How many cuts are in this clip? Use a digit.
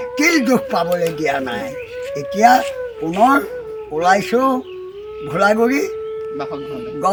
0